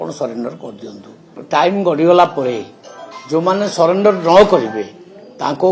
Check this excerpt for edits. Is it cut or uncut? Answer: cut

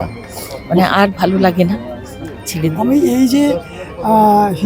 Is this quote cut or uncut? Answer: cut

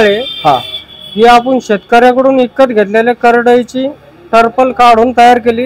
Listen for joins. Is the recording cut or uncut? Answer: uncut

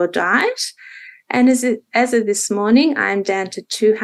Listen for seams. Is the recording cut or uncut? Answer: uncut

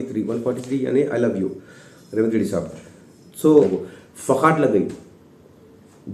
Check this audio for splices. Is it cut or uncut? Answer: cut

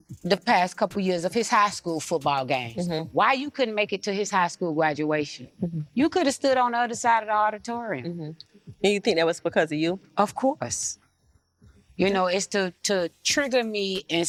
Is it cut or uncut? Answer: uncut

